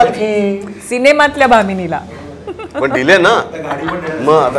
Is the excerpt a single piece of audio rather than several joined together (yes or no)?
yes